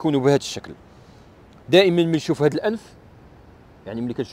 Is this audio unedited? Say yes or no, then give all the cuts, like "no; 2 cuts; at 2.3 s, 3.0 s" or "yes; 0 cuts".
yes; 0 cuts